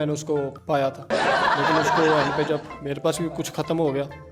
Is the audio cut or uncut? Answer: uncut